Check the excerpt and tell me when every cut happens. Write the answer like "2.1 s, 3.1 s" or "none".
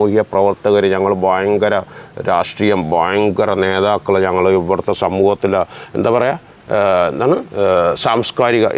none